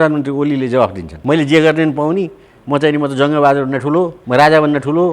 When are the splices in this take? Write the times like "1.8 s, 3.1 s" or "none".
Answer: 1.1 s, 4.2 s

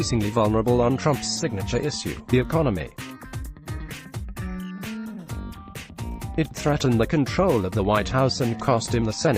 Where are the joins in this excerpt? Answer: 2.9 s, 4.9 s, 6.6 s, 8.5 s

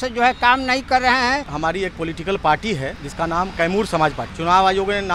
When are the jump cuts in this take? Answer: 1.5 s, 3.0 s, 4.3 s

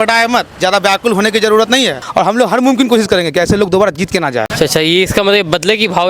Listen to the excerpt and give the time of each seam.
2.0 s, 4.5 s

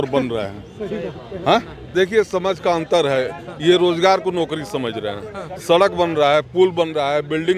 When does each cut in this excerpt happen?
1.8 s

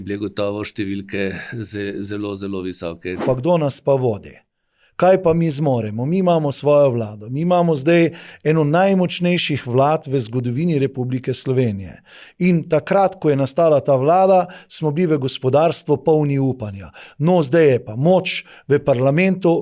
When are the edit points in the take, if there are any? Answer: 3.2 s

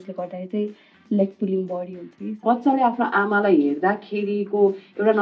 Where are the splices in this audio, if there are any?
2.4 s

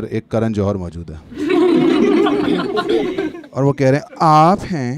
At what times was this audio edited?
none

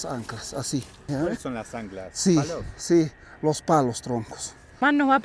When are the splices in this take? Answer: none

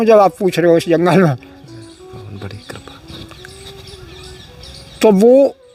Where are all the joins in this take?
none

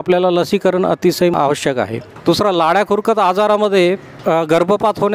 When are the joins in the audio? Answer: 2.1 s, 4.1 s

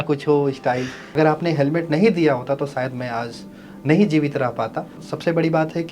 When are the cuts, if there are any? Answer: 1.0 s, 4.9 s

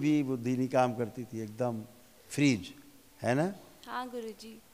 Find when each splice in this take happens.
none

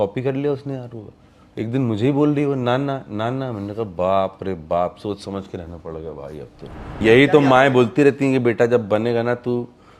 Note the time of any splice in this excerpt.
7.0 s

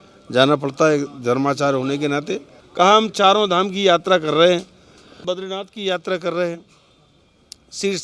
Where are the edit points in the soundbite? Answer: 2.6 s, 5.2 s

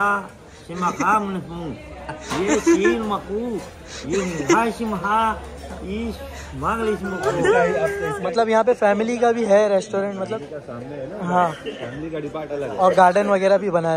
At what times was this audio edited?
8.1 s

